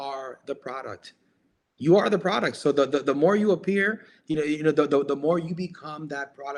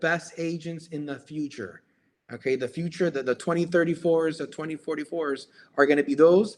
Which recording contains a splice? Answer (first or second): second